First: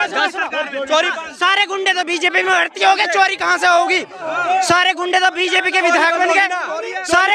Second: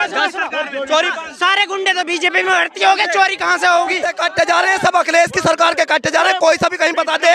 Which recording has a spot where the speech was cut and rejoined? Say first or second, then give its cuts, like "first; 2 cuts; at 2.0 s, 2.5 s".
second; 1 cut; at 4.1 s